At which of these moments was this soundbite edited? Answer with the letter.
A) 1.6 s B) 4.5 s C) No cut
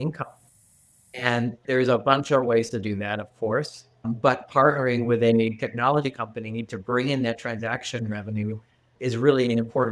A